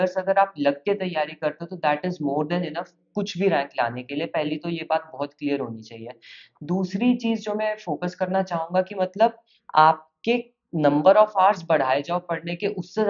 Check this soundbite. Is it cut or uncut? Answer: uncut